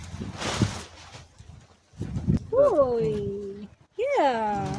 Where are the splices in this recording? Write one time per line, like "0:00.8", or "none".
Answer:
0:02.4

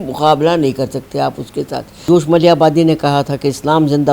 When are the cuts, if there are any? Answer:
0:01.9

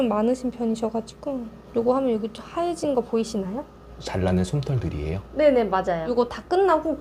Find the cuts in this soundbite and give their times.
0:01.5
0:04.0

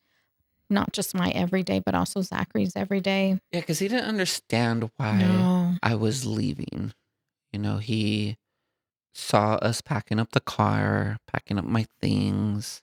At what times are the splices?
none

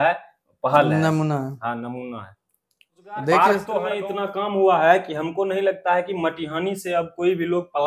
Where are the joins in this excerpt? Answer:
0:03.8

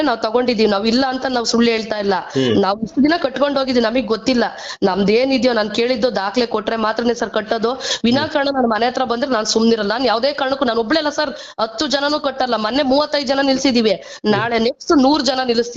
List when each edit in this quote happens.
none

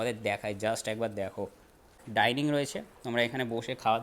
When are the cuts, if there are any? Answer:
0:02.0

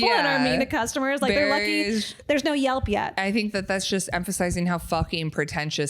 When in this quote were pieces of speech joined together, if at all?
0:03.1

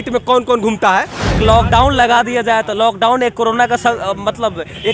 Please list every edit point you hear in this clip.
0:01.4

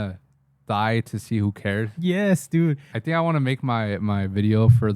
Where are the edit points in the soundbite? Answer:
0:02.9

